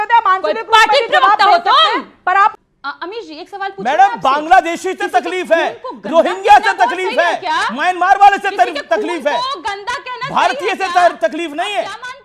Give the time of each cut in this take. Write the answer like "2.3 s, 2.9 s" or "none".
2.6 s